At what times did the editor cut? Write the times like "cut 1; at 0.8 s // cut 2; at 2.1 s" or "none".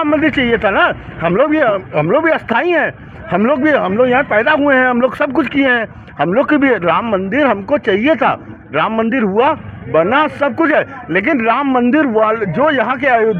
none